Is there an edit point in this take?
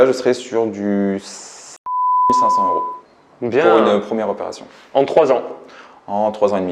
no; 0 cuts

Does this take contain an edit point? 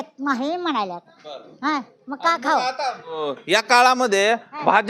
no; 0 cuts

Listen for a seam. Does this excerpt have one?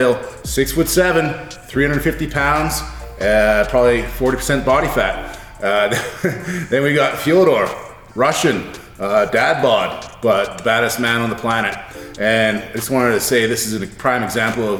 no; 0 cuts

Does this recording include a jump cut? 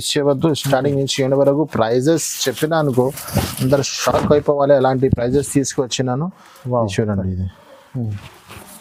no; 0 cuts

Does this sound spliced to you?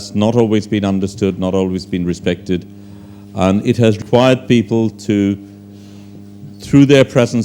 yes; 1 cut; at 4.0 s

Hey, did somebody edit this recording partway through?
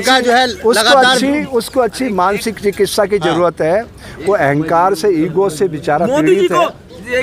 no; 0 cuts

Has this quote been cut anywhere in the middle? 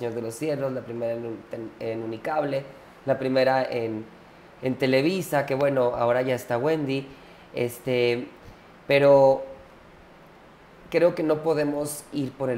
no; 0 cuts

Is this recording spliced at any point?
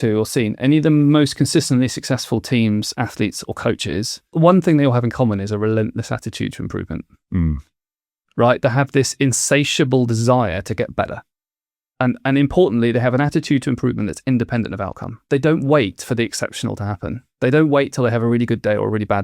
yes; 2 cuts; at 4.3 s, 15.2 s

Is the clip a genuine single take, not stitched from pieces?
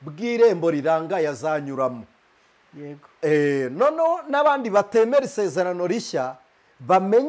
yes; 0 cuts

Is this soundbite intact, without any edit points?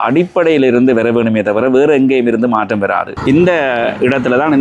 no; 1 cut; at 3.1 s

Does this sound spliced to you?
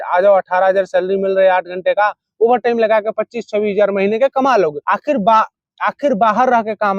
no; 0 cuts

